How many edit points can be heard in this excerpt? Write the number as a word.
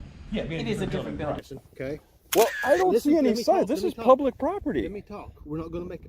one